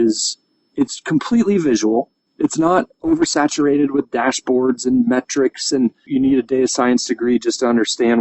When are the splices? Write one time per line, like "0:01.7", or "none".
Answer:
0:02.2
0:06.1